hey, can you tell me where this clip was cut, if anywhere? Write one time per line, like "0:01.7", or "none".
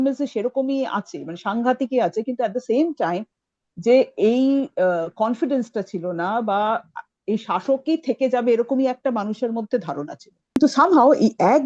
0:10.6